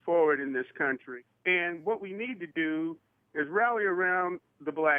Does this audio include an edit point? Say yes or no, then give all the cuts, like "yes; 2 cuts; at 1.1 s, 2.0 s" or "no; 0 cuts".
yes; 1 cut; at 1.0 s